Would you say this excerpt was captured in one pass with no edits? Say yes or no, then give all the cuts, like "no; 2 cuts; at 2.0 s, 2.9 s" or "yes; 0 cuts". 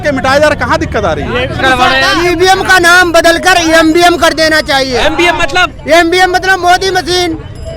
no; 1 cut; at 1.6 s